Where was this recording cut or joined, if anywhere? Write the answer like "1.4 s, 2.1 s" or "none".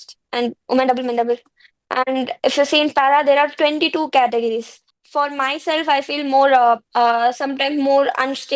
5.0 s, 6.9 s